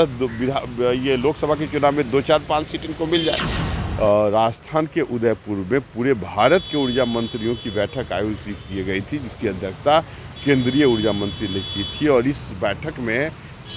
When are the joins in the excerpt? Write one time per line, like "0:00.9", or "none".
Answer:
0:03.6